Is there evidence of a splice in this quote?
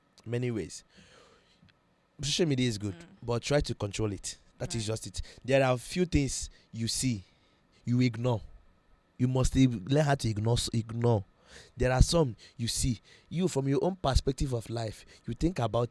no; 0 cuts

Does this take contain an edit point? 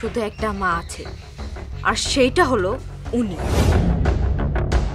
no; 0 cuts

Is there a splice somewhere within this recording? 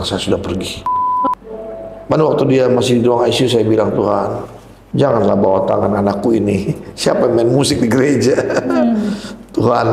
yes; 1 cut; at 1.3 s

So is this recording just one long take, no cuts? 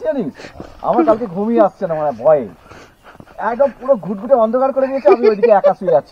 yes; 0 cuts

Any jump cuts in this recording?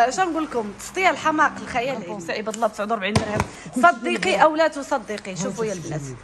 yes; 1 cut; at 2.1 s

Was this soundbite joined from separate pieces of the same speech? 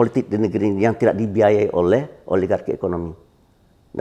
no; 0 cuts

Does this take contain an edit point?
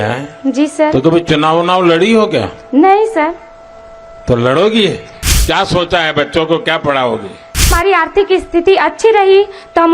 yes; 2 cuts; at 5.1 s, 7.7 s

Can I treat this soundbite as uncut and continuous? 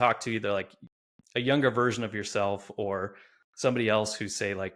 yes; 0 cuts

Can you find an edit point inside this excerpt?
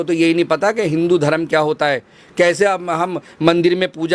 no; 0 cuts

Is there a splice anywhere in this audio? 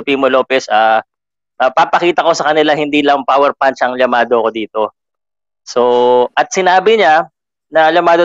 no; 0 cuts

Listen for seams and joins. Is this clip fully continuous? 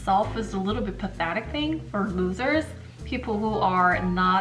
yes; 0 cuts

